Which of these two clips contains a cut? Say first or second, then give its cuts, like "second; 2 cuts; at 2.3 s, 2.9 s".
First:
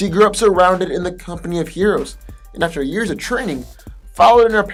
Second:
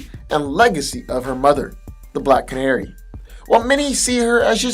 second; 1 cut; at 1.0 s